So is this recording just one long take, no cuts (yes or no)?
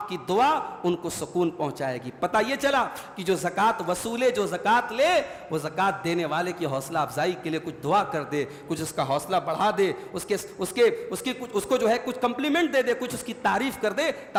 yes